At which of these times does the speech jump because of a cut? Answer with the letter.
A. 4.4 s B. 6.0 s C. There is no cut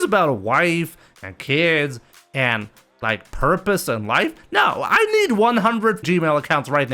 B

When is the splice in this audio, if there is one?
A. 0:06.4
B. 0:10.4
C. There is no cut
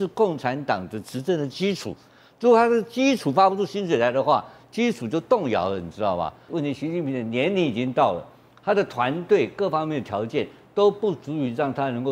A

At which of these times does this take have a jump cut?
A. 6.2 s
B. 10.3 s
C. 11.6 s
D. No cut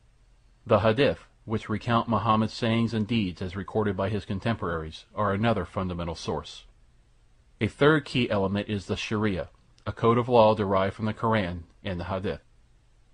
D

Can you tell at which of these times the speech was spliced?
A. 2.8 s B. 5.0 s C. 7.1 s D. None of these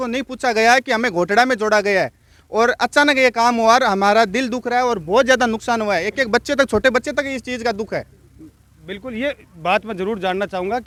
D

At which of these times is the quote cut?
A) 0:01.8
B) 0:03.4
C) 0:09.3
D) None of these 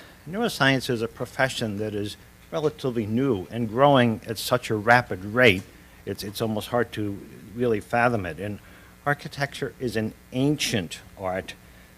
C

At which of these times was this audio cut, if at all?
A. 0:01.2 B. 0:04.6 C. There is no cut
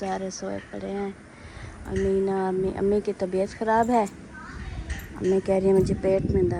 C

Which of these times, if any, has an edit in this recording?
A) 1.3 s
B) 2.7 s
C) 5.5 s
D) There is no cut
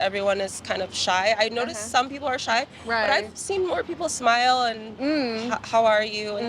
D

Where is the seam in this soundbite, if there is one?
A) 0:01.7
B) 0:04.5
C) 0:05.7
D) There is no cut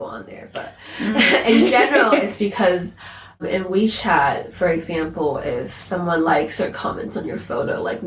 D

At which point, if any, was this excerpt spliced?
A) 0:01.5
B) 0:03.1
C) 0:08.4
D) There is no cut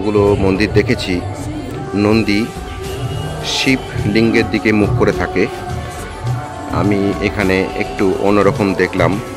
D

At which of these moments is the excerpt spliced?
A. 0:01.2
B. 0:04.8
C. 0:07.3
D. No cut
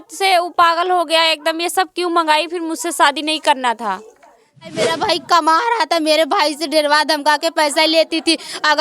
B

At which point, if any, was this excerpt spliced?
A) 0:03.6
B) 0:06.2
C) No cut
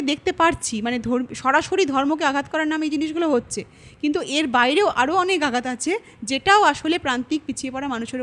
C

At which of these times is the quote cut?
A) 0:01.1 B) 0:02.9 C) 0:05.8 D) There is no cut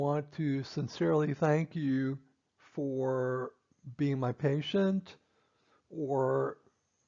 B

